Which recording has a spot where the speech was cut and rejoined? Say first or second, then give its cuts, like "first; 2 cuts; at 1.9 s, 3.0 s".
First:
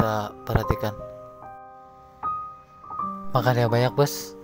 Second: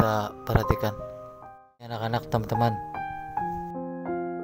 second; 1 cut; at 2.0 s